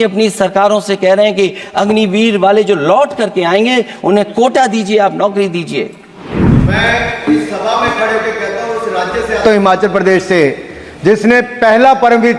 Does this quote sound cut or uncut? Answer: cut